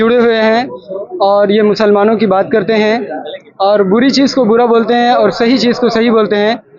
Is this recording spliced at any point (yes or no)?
no